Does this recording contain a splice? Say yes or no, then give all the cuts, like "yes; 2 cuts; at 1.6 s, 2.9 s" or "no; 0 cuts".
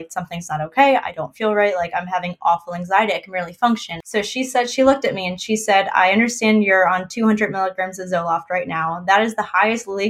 yes; 1 cut; at 3.9 s